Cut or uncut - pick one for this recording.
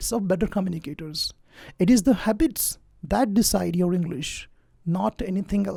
uncut